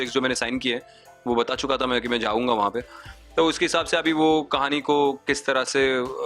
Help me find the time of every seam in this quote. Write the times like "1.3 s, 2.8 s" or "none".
none